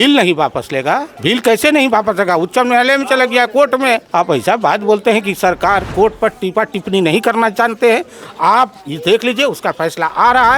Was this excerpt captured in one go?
no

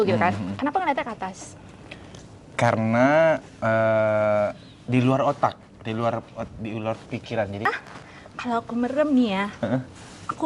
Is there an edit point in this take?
yes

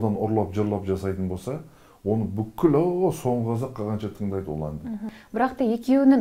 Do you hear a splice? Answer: yes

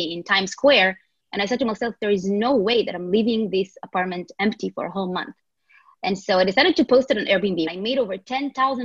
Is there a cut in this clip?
yes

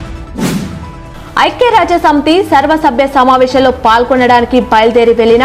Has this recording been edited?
yes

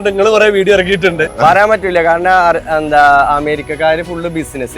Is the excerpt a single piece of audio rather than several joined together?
no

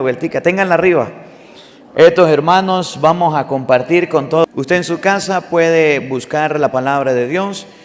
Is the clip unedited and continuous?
no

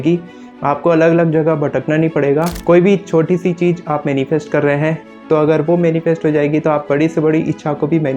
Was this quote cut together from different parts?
yes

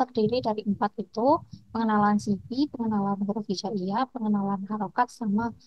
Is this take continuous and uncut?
yes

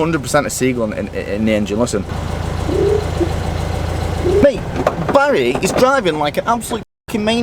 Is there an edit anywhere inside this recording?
yes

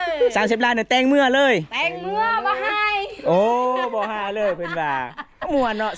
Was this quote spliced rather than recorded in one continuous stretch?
no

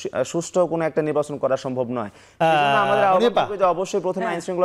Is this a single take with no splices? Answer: yes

